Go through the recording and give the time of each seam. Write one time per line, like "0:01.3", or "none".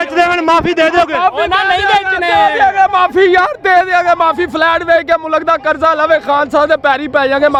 none

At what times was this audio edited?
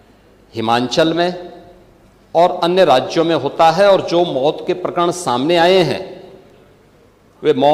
none

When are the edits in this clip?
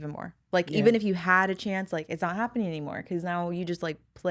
none

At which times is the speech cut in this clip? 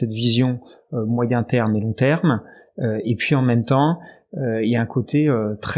none

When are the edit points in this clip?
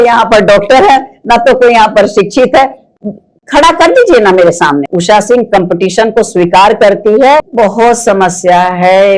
0:04.9
0:07.5

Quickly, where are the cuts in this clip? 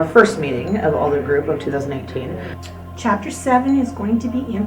0:02.4

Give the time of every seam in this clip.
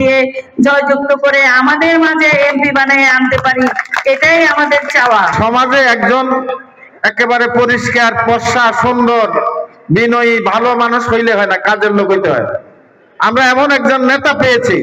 0:05.3

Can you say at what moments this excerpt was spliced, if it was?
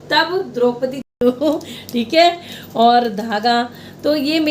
0:01.1

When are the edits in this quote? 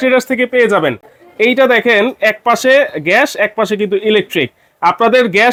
none

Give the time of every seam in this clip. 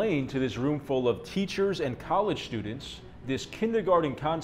none

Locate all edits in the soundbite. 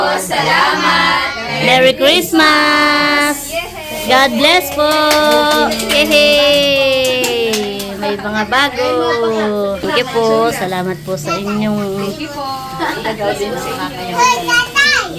none

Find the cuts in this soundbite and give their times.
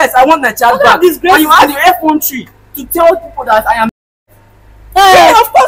none

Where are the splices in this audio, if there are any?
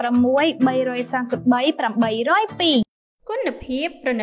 0:02.8

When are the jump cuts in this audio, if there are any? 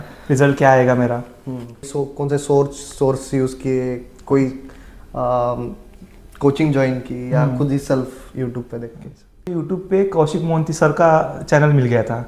0:01.9
0:09.5

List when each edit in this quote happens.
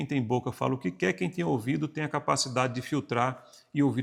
none

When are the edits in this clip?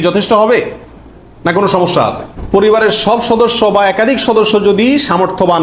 0:02.3

